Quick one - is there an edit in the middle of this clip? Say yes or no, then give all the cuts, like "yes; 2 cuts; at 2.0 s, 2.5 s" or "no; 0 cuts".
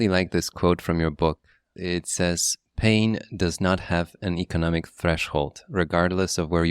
yes; 1 cut; at 1.7 s